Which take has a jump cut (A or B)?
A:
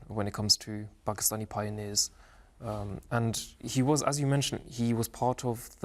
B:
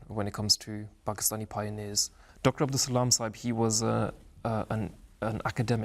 B